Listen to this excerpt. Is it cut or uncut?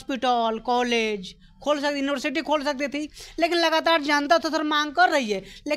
uncut